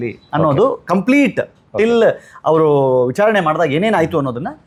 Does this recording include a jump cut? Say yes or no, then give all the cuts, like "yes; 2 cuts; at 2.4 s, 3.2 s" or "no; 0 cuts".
no; 0 cuts